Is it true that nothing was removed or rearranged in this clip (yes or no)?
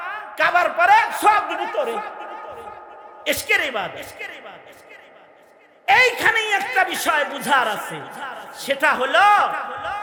yes